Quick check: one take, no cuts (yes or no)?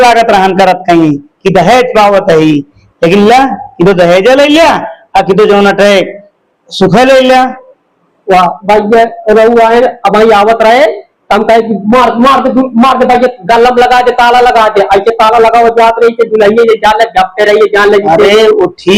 yes